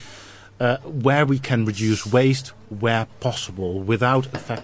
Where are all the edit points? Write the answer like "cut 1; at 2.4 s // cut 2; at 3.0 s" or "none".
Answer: none